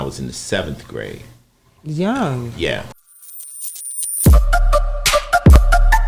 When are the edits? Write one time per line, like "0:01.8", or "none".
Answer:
0:02.9